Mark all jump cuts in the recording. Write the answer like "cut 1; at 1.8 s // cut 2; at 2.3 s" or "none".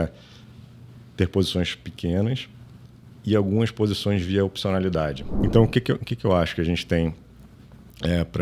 cut 1; at 5.3 s